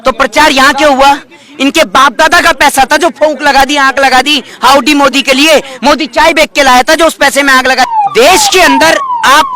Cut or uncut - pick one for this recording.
cut